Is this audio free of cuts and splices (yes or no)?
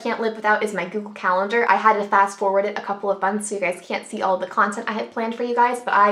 yes